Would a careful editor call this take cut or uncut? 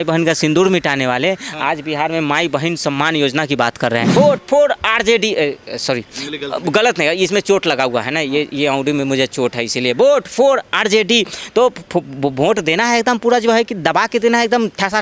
cut